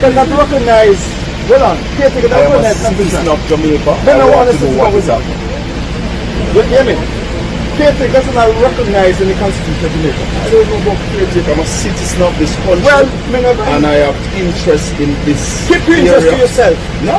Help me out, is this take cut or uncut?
uncut